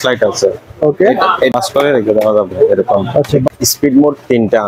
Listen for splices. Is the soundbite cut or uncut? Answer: cut